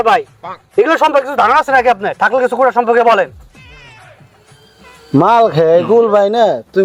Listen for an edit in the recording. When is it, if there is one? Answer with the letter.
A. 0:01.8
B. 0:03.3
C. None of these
C